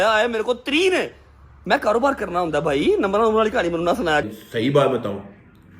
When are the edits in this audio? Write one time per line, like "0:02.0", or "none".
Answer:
0:04.2

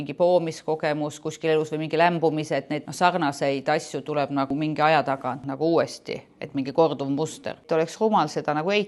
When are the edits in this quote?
0:02.8
0:04.5
0:05.5
0:07.6

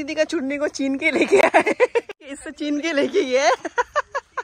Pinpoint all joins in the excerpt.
0:02.2

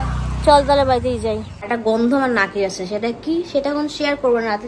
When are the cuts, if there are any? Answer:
0:01.5

